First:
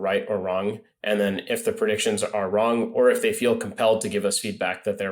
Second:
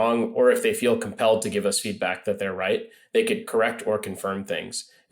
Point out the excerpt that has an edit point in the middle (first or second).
second